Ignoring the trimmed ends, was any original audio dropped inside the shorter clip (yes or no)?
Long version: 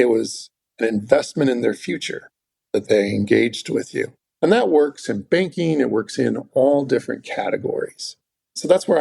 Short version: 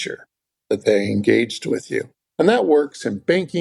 no